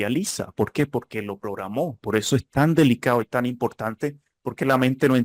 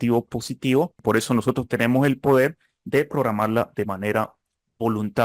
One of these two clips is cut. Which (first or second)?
second